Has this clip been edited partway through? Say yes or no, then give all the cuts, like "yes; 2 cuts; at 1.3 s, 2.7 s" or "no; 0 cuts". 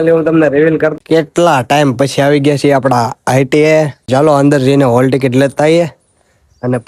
yes; 2 cuts; at 0.9 s, 4.0 s